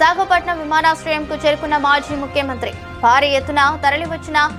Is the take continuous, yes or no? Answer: yes